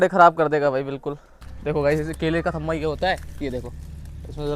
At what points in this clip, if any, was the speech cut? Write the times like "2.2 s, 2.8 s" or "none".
1.5 s